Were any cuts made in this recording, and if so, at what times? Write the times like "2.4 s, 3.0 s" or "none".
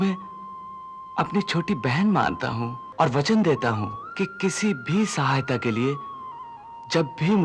2.8 s, 4.0 s